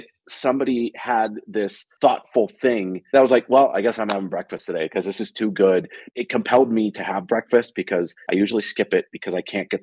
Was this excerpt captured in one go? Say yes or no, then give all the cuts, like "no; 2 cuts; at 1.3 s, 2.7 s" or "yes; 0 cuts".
no; 1 cut; at 6.0 s